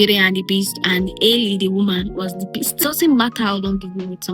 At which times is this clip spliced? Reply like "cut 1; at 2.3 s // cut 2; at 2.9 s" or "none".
cut 1; at 2.8 s